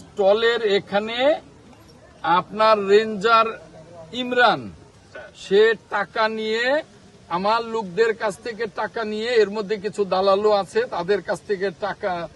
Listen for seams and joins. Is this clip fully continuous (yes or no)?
yes